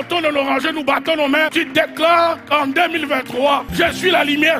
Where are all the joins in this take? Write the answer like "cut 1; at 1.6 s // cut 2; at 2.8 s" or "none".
cut 1; at 1.5 s // cut 2; at 3.7 s

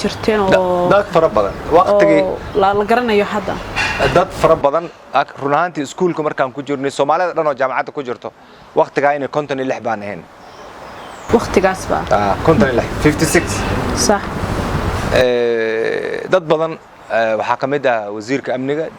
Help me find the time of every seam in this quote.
none

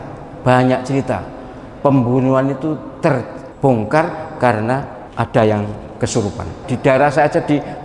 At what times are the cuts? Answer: cut 1; at 3.4 s // cut 2; at 5.0 s // cut 3; at 6.6 s

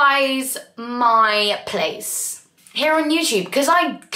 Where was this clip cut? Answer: none

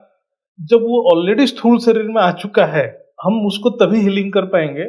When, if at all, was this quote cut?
cut 1; at 3.0 s

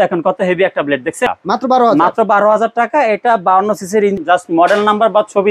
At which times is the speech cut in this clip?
cut 1; at 1.3 s // cut 2; at 4.2 s

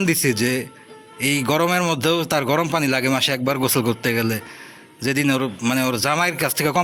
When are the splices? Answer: none

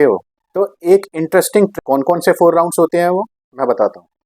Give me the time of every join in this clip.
cut 1; at 1.7 s

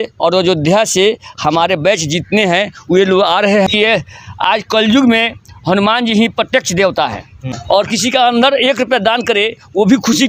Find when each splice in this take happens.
cut 1; at 3.7 s // cut 2; at 7.1 s

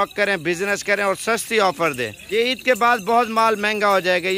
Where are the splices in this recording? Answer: cut 1; at 2.3 s

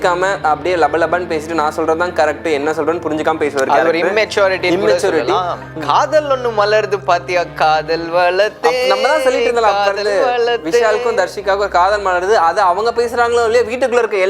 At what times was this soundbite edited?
cut 1; at 5.7 s

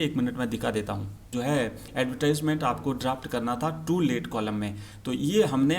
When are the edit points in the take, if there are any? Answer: cut 1; at 1.3 s

